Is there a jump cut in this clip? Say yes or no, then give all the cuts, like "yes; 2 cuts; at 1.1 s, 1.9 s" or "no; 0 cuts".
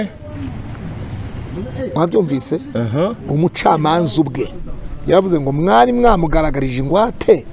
no; 0 cuts